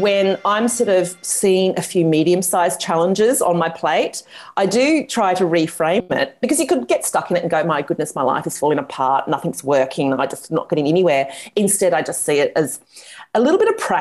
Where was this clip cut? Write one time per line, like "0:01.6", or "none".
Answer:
none